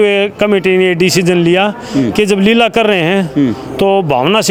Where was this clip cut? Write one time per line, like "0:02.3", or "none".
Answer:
none